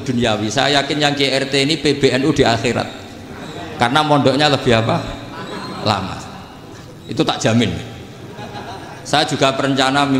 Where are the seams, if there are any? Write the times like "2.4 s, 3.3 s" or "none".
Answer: none